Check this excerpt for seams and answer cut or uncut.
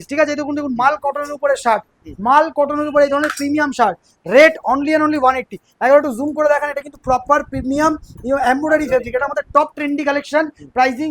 uncut